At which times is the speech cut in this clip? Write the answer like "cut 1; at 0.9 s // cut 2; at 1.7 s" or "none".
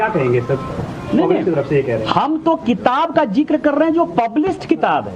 cut 1; at 2.8 s